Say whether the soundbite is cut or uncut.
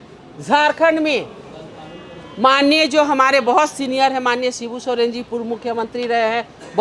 uncut